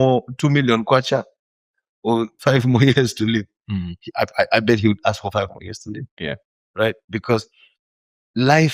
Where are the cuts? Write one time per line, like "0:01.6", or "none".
none